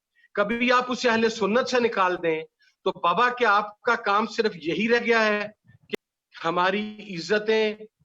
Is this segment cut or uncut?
cut